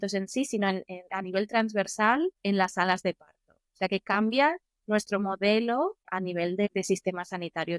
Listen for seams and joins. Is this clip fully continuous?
yes; 0 cuts

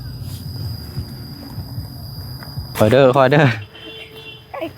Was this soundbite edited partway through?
yes; 1 cut; at 2.7 s

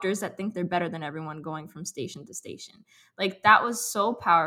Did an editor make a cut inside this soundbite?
no; 0 cuts

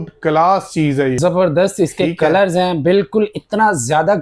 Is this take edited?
yes; 1 cut; at 1.2 s

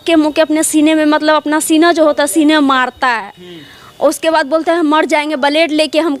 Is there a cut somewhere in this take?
no; 0 cuts

